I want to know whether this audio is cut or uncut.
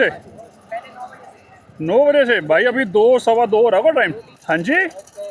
cut